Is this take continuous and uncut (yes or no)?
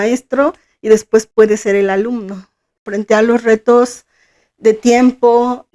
no